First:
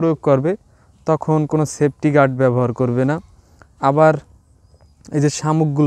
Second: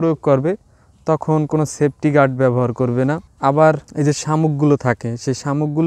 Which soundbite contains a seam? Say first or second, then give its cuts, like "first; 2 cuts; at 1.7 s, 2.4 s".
second; 2 cuts; at 3.3 s, 3.9 s